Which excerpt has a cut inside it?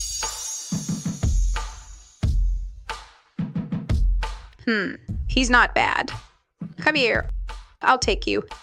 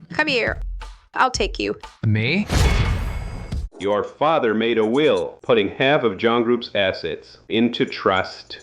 second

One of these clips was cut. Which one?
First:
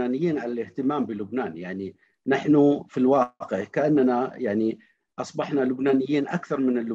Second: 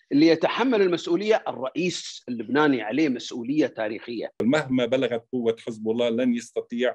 second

